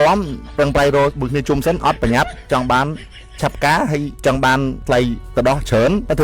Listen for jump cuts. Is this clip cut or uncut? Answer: uncut